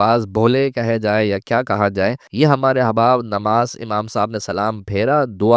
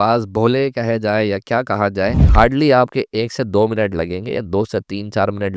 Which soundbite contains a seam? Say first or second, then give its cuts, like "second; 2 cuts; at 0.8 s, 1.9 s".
second; 1 cut; at 2.2 s